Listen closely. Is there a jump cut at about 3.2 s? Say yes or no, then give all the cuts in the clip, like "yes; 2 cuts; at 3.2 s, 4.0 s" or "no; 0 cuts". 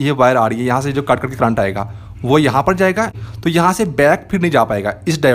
yes; 1 cut; at 3.2 s